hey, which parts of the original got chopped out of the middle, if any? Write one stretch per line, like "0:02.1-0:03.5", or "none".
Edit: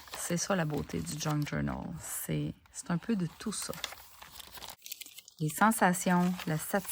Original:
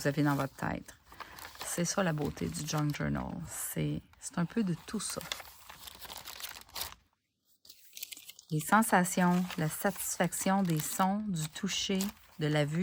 0:06.2-0:07.9